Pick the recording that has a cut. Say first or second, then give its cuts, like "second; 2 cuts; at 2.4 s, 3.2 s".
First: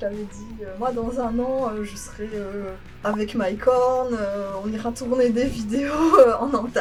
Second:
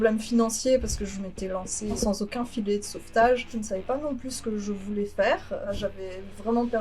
second; 3 cuts; at 2.0 s, 3.5 s, 5.8 s